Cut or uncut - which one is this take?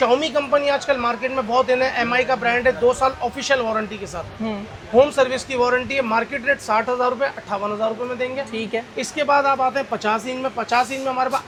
uncut